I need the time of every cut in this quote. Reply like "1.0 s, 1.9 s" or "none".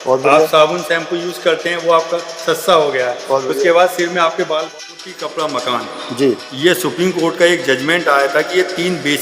4.7 s